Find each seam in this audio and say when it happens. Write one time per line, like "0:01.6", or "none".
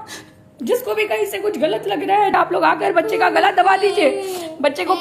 0:02.3